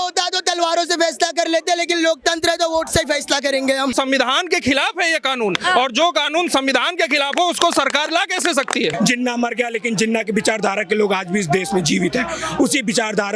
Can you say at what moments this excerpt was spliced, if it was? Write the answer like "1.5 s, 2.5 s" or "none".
3.9 s, 8.9 s